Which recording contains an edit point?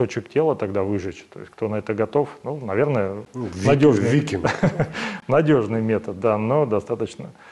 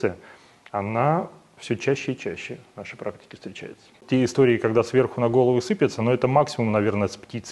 second; 1 cut; at 4.0 s

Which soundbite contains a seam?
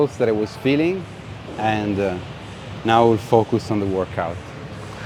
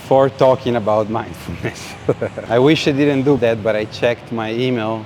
second; 2 cuts; at 2.4 s, 3.4 s

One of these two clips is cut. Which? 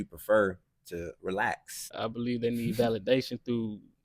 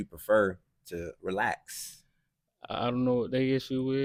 first; 1 cut; at 1.9 s

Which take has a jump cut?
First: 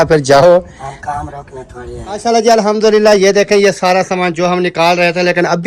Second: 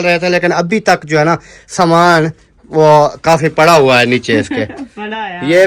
first; 1 cut; at 2.0 s

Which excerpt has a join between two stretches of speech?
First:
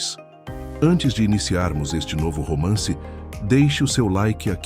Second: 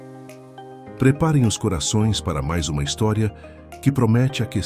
second; 1 cut; at 1.0 s

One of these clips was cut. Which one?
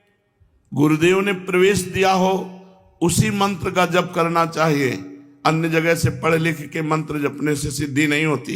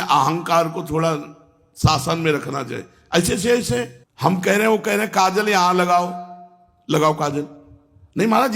second; 1 cut; at 4.0 s

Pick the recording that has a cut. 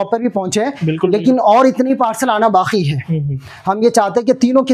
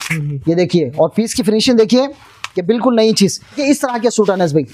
second; 1 cut; at 3.6 s

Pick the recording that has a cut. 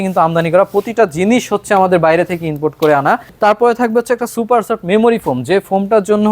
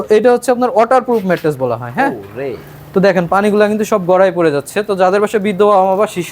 first; 1 cut; at 3.3 s

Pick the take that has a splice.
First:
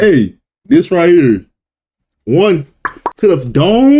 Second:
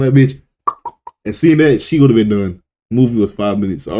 first; 1 cut; at 3.1 s

